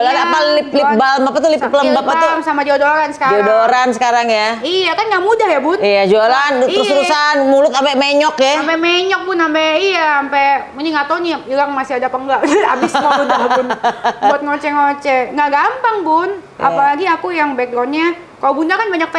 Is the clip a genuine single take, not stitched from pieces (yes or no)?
yes